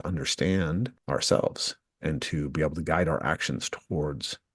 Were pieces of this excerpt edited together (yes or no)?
yes